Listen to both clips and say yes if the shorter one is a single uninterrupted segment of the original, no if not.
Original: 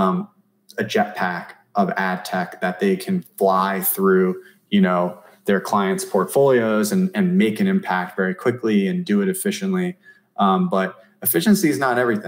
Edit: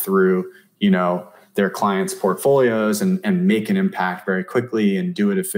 yes